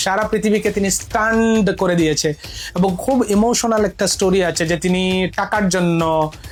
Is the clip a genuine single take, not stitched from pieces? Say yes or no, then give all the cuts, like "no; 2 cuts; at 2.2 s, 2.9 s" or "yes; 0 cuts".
yes; 0 cuts